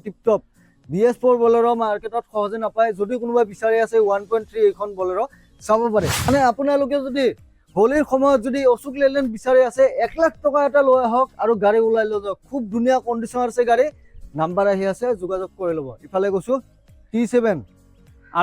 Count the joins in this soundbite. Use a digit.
1